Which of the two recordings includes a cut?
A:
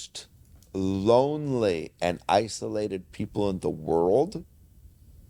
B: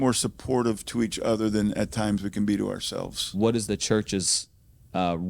B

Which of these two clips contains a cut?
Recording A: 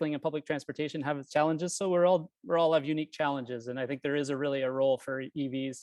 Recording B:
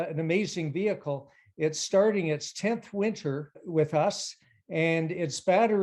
B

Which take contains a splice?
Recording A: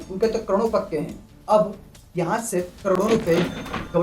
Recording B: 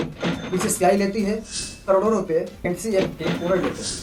A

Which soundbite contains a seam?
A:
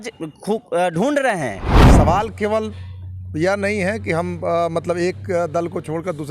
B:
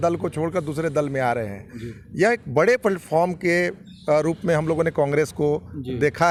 A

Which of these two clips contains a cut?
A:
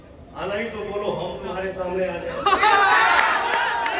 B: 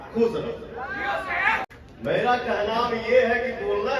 B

